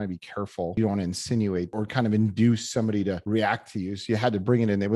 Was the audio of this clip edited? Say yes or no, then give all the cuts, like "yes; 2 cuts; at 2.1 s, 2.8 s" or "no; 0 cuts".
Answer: yes; 3 cuts; at 0.8 s, 1.7 s, 3.2 s